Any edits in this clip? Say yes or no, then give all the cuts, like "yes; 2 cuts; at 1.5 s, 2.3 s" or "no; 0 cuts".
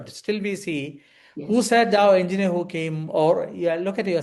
no; 0 cuts